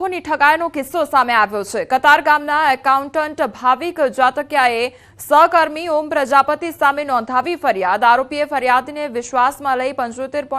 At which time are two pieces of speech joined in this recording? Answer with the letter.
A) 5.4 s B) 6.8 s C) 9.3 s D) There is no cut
D